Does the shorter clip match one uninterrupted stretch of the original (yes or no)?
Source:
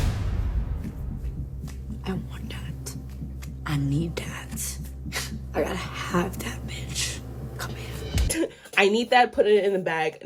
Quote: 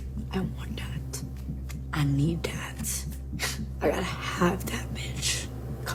yes